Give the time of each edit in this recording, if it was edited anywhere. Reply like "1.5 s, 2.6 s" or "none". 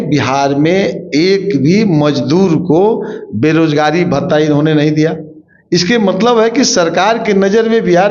none